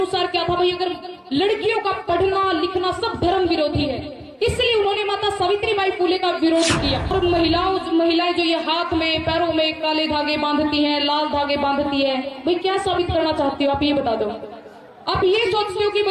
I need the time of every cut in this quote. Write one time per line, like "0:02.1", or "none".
0:07.1